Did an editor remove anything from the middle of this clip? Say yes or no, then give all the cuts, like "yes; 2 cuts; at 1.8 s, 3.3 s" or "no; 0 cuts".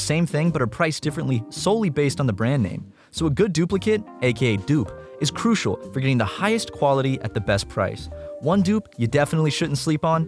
no; 0 cuts